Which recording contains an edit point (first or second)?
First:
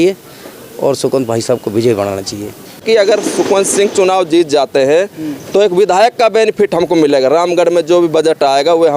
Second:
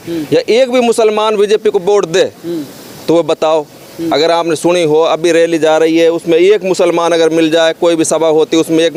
first